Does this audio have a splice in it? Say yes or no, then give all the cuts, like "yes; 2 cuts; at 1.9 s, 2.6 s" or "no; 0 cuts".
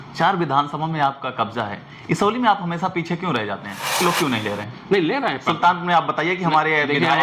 yes; 1 cut; at 3.9 s